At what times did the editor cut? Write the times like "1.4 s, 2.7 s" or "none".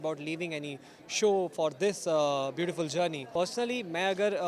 3.2 s